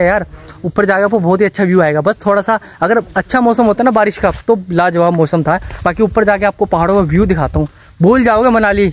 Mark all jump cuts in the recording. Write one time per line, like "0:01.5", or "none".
none